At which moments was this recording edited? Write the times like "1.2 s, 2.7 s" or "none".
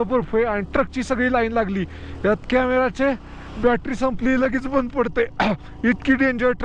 none